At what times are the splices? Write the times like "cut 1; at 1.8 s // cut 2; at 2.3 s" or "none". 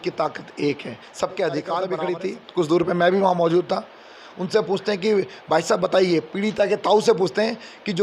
cut 1; at 1.9 s

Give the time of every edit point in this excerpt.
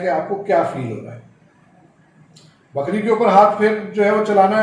none

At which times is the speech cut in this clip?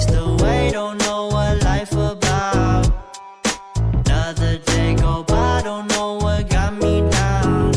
none

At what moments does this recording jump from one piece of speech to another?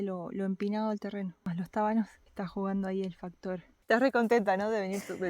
cut 1; at 1.4 s // cut 2; at 2.2 s // cut 3; at 3.7 s

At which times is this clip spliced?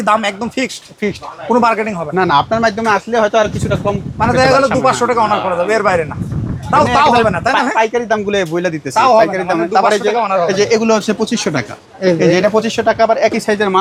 none

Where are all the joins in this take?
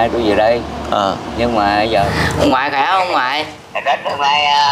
cut 1; at 1.9 s

